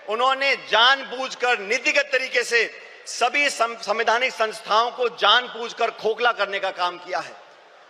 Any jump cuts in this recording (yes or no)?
no